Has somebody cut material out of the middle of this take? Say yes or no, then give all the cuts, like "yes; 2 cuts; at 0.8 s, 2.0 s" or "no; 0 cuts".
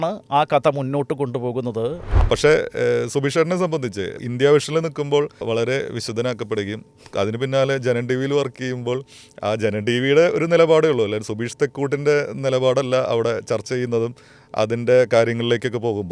yes; 1 cut; at 2.0 s